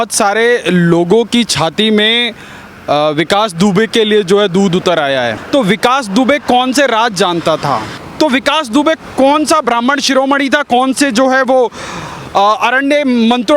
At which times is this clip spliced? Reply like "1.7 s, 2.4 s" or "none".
5.4 s, 8.0 s